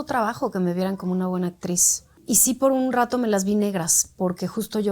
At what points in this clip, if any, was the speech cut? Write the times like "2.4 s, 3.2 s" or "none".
2.2 s